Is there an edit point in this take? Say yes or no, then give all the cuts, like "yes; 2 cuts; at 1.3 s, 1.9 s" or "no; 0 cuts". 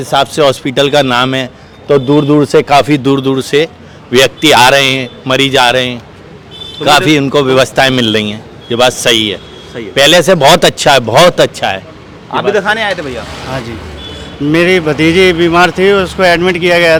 no; 0 cuts